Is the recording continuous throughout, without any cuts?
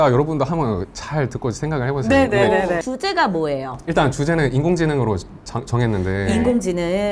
yes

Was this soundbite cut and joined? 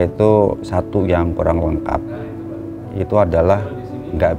no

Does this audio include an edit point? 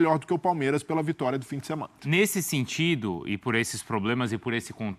yes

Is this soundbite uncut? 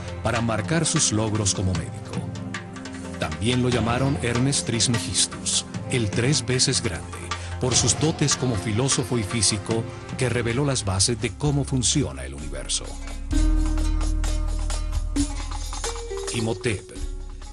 no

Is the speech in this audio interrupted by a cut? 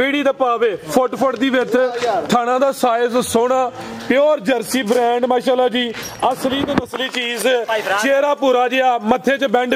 no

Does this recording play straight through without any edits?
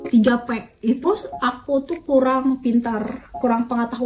no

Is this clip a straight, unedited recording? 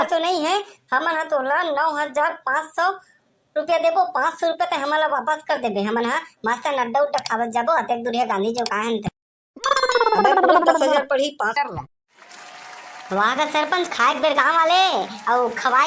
no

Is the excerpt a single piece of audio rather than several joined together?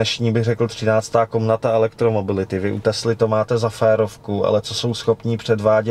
yes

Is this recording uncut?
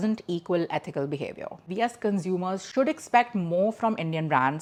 yes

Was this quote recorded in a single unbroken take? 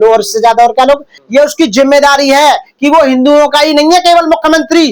no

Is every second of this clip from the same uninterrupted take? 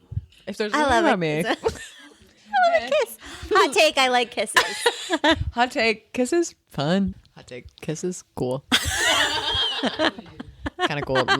no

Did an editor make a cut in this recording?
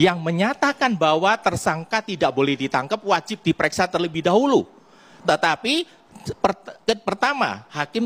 no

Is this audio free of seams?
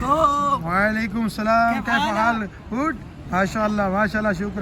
yes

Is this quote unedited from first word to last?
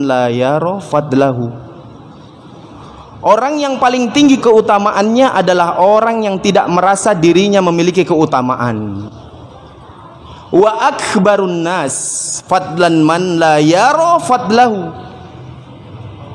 no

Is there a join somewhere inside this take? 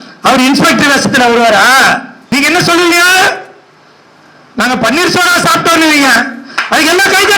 yes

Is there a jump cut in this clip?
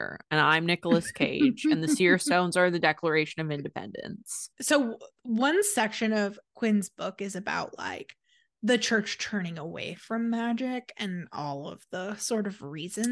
no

